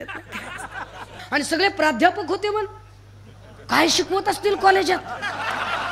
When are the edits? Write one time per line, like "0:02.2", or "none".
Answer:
0:01.2